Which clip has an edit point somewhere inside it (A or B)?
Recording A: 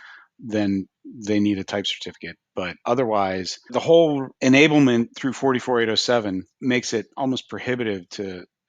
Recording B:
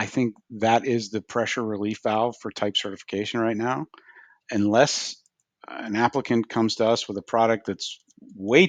A